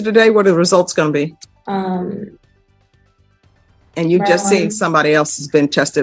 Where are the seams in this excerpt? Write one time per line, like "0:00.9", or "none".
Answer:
none